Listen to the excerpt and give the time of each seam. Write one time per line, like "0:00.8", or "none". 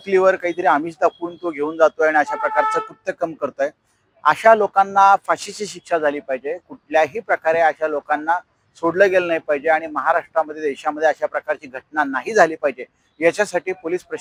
none

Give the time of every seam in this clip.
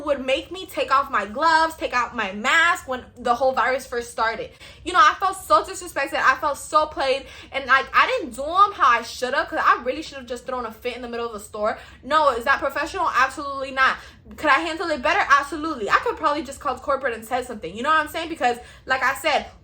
0:04.7

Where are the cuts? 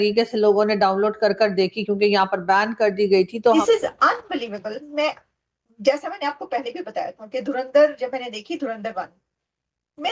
0:03.3

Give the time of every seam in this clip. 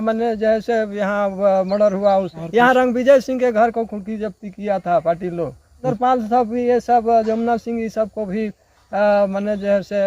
0:02.4
0:05.9

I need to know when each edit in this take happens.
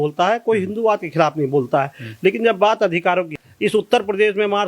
0:03.4

